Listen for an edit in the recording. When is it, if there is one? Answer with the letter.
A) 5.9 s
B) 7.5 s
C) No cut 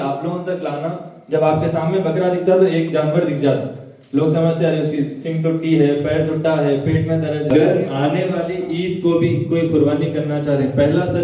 B